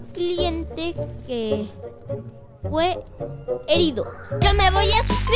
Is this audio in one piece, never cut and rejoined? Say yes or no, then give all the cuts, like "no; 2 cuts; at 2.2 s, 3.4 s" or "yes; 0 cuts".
no; 1 cut; at 4.2 s